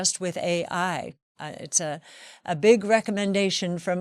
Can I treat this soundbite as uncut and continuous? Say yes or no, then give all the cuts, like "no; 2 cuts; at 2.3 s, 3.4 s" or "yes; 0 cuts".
yes; 0 cuts